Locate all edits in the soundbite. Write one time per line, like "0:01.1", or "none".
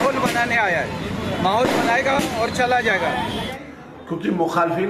0:03.5